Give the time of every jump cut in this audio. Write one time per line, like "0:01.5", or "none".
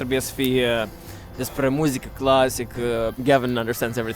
0:03.1

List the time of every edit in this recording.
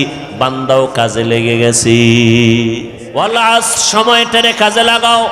0:03.0

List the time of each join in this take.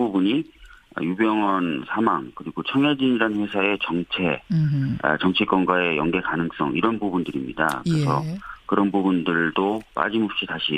0:04.8

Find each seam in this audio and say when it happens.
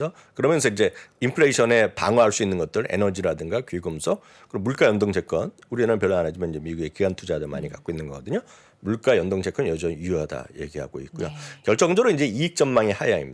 none

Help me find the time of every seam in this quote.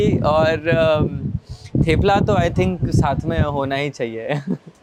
none

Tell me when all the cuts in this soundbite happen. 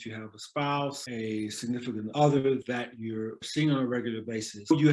0:03.4

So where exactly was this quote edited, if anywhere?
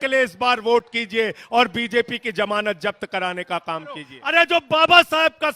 0:04.1

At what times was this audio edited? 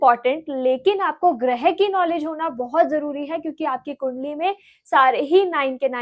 none

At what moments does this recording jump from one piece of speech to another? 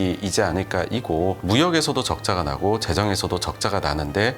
0:01.4

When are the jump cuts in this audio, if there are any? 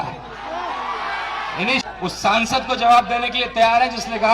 0:01.8

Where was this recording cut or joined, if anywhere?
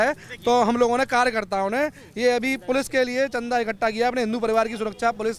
none

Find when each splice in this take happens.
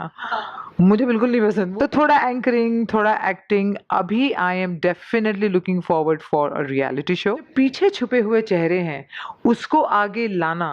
0:01.6
0:07.5

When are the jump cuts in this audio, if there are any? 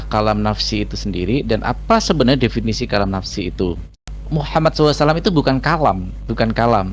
0:04.2

